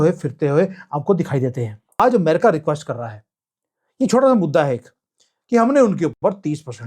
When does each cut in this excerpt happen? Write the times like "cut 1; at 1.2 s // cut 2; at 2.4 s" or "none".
cut 1; at 2.0 s